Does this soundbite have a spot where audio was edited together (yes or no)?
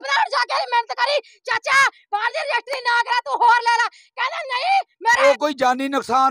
yes